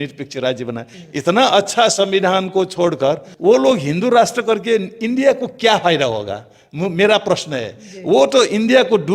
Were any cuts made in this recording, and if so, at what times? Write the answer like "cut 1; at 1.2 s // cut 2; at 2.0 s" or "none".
cut 1; at 0.9 s